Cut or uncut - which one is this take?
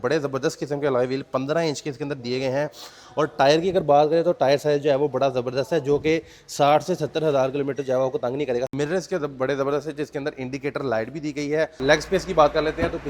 cut